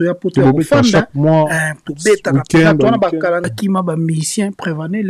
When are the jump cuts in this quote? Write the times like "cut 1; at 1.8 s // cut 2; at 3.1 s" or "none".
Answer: cut 1; at 3.5 s